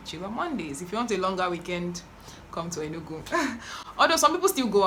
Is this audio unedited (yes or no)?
yes